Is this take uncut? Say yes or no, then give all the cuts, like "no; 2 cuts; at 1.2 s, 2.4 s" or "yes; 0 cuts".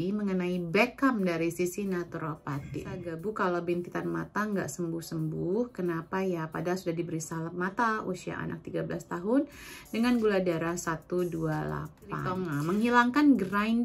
no; 2 cuts; at 3.1 s, 12.3 s